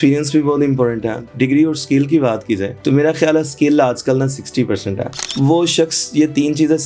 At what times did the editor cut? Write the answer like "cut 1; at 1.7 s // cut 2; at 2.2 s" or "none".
cut 1; at 1.3 s // cut 2; at 5.3 s